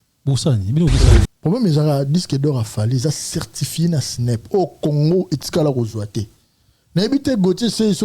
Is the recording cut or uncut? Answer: cut